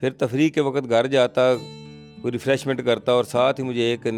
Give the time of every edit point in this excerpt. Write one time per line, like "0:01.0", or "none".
none